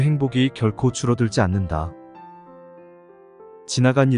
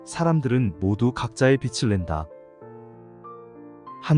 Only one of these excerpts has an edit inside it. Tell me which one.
first; 2 cuts; at 1.9 s, 3.2 s

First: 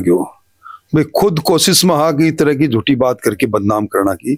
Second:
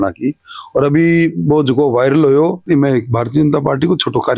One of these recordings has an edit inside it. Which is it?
second; 1 cut; at 2.6 s

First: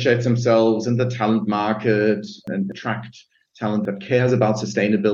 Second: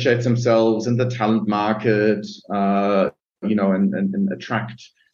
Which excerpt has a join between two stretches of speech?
first; 2 cuts; at 2.4 s, 3.8 s

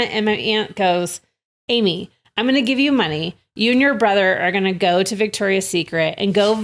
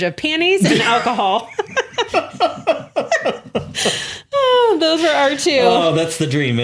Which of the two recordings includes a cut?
second; 1 cut; at 2.1 s

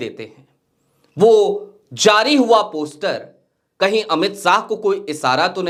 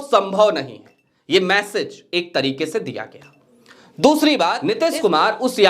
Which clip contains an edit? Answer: second; 1 cut; at 4.7 s

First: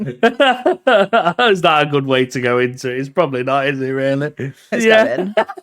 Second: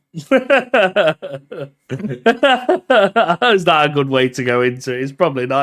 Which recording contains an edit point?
first; 1 cut; at 4.7 s

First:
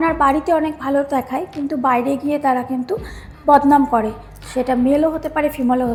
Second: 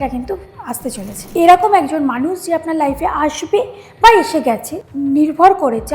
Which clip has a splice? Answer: second; 2 cuts; at 1.1 s, 4.9 s

